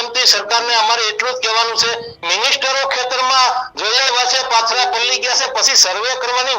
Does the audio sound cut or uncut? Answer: uncut